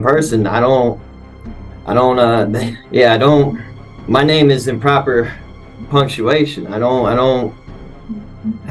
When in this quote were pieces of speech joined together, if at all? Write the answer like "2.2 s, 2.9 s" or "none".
none